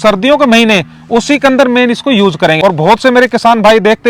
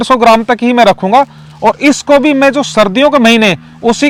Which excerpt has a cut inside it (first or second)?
first